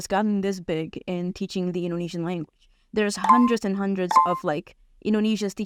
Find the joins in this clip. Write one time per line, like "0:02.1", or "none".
none